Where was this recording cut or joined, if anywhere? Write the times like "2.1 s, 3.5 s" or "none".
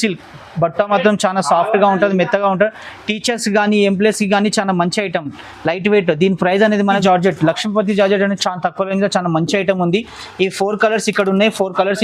7.0 s